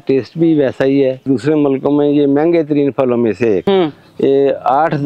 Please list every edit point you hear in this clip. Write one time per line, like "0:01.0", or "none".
0:01.2
0:03.6